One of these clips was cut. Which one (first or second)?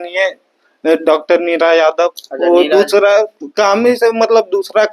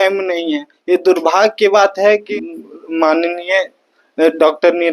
second